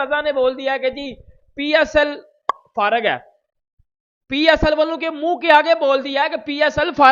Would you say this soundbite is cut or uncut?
uncut